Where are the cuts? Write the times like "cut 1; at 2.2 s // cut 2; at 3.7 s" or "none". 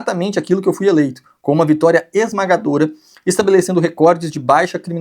none

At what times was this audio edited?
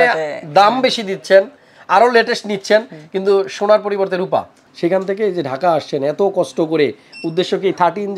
cut 1; at 4.6 s

